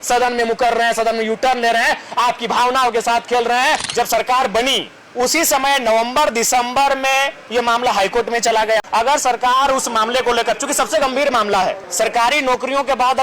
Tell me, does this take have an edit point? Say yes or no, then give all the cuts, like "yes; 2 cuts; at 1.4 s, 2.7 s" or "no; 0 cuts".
yes; 3 cuts; at 3.9 s, 8.9 s, 11.8 s